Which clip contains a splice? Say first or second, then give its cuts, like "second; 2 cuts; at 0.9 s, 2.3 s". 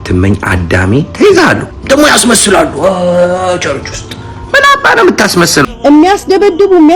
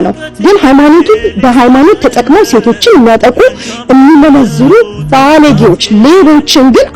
first; 2 cuts; at 1.7 s, 5.6 s